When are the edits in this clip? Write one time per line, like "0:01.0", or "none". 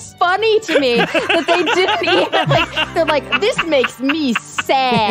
0:02.9